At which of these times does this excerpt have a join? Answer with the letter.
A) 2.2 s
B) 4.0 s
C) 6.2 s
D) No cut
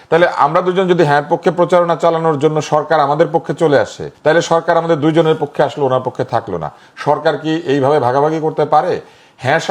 B